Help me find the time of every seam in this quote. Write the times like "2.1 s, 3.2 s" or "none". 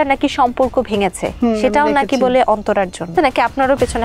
3.1 s